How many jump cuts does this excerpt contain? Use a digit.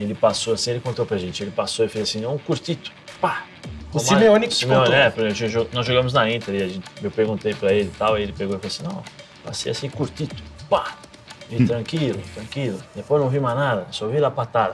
0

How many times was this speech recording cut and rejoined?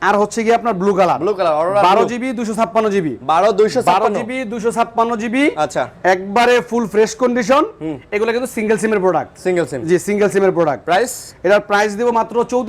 0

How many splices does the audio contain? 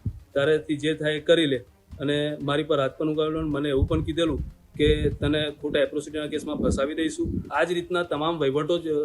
1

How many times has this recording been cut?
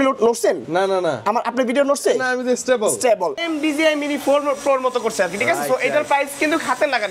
1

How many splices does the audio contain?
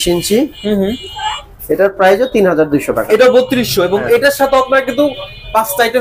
0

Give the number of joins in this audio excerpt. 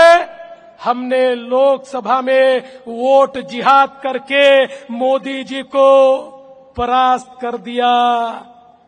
0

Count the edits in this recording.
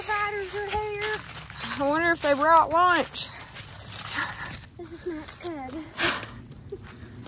1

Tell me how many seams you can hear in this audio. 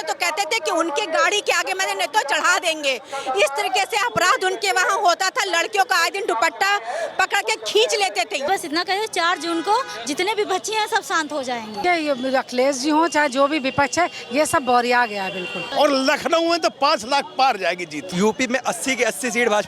4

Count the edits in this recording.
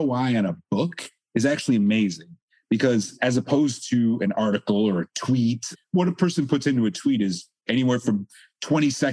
1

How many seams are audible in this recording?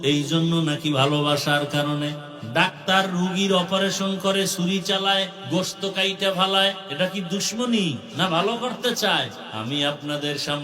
5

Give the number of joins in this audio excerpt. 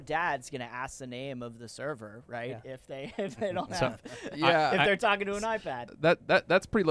1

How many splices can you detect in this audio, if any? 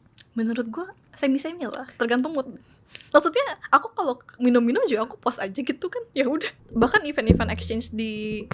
1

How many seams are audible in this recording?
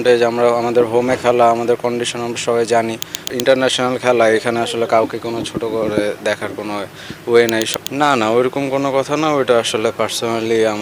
2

